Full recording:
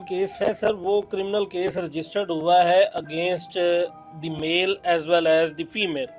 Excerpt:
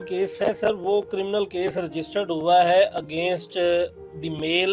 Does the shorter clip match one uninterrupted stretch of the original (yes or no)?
yes